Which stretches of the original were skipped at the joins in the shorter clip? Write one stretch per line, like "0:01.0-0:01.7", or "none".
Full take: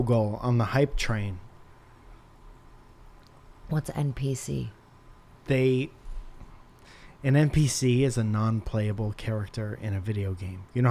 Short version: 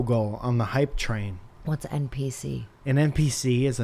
0:01.5-0:03.5
0:04.7-0:07.1